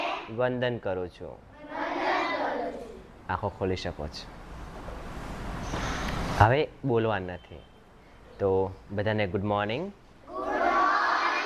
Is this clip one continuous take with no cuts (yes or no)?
yes